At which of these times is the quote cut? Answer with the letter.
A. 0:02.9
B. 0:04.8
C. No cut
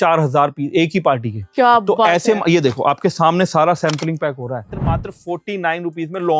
B